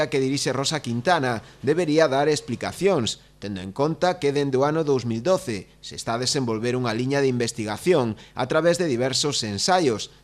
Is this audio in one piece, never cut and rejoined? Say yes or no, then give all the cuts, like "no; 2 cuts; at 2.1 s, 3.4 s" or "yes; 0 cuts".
yes; 0 cuts